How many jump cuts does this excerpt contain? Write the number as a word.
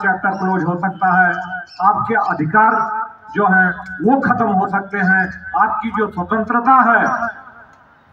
zero